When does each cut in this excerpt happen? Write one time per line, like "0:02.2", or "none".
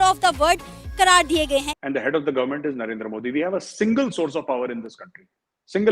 0:01.7